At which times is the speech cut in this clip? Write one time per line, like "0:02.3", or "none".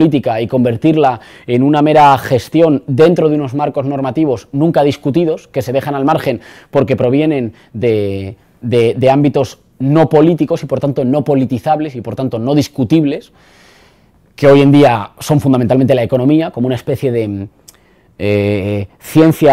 0:07.8